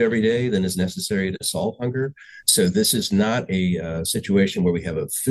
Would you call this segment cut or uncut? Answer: uncut